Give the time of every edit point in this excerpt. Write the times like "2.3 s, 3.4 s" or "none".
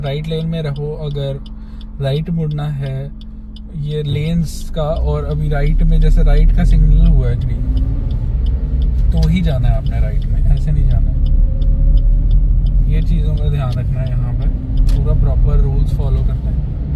none